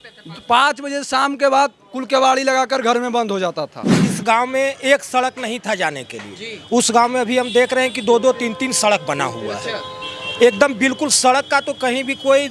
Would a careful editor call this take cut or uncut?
cut